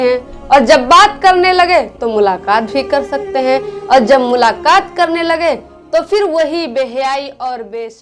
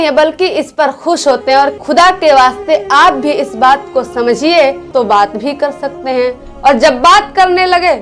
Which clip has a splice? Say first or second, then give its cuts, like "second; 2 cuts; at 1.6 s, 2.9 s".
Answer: second; 2 cuts; at 1.8 s, 4.8 s